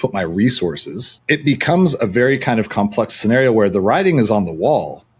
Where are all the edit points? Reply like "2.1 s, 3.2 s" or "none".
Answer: 1.1 s